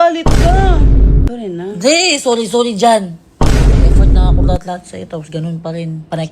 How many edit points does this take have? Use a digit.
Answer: 1